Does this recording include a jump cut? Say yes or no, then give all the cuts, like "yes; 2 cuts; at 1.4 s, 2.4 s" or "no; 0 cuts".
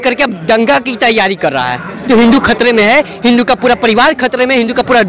no; 0 cuts